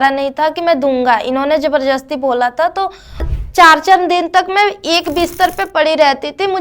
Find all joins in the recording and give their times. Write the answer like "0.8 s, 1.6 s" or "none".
3.4 s